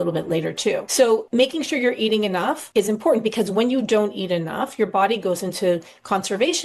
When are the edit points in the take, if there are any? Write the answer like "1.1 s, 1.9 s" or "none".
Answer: 1.2 s, 2.6 s

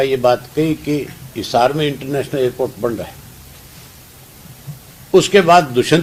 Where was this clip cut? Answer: none

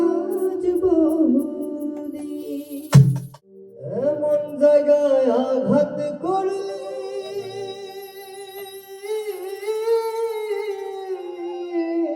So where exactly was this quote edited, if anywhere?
3.3 s

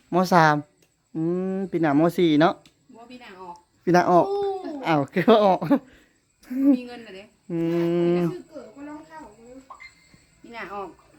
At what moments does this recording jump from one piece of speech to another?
none

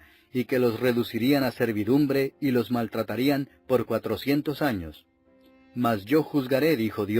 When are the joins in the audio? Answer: 4.9 s

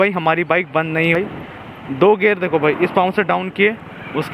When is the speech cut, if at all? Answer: 1.2 s

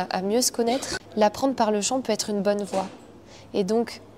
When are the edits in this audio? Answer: 1.0 s

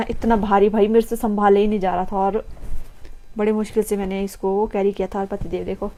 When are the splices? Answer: none

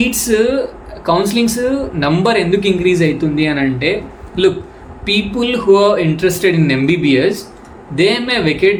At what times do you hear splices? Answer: none

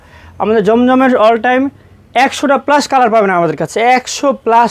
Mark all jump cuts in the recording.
none

